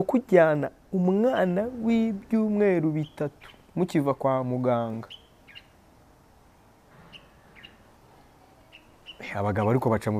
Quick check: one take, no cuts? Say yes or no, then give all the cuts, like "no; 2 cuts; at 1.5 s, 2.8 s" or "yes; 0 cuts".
yes; 0 cuts